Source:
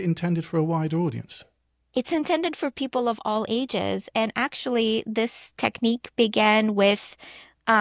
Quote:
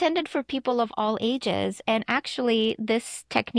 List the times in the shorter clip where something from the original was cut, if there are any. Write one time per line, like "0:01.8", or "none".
none